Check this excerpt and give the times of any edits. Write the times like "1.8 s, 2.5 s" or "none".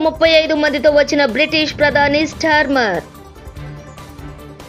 none